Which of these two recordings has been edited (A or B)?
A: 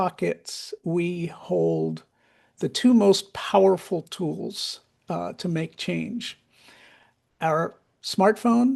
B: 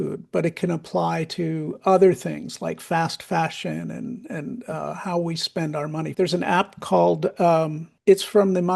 B